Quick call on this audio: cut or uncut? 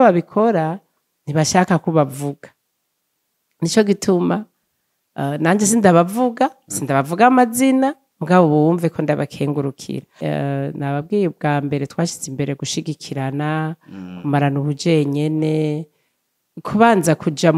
cut